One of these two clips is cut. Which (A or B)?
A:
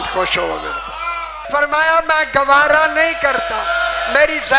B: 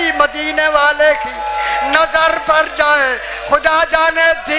A